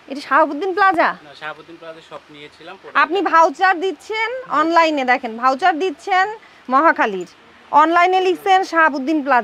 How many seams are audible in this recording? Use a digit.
0